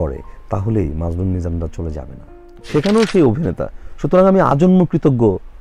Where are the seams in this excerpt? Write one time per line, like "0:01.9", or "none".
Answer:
0:02.5